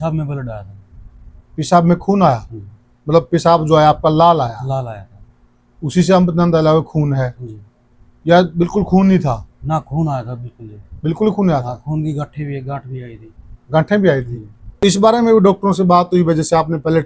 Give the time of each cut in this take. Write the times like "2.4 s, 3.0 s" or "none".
14.8 s